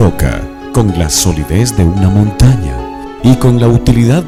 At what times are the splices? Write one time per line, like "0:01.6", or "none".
none